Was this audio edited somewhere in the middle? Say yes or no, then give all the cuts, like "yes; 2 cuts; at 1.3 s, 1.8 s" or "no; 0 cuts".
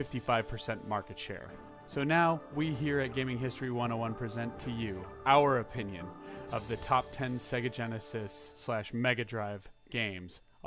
yes; 1 cut; at 8.9 s